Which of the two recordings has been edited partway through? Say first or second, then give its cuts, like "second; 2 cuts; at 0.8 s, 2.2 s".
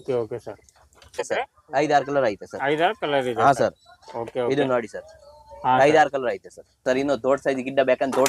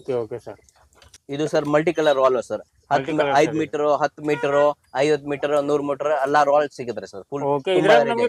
first; 2 cuts; at 1.2 s, 6.7 s